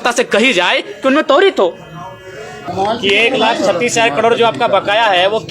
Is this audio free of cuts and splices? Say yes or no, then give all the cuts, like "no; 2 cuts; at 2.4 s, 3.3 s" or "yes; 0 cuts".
no; 1 cut; at 2.7 s